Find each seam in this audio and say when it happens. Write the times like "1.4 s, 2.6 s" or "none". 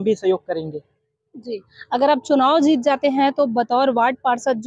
none

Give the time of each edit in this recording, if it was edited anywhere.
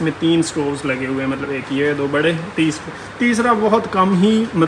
none

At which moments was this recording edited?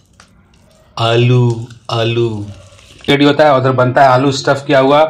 3.1 s

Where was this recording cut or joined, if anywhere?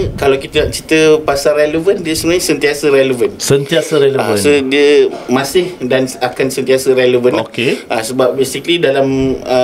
none

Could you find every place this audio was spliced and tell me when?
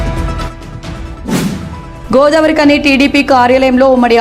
1.3 s

